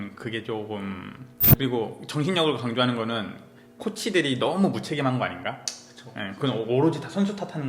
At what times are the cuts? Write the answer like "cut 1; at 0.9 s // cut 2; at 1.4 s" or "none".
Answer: cut 1; at 1.4 s